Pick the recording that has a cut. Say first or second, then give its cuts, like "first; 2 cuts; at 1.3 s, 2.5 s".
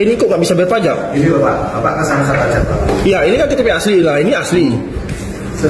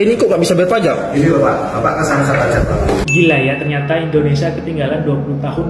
second; 1 cut; at 3.0 s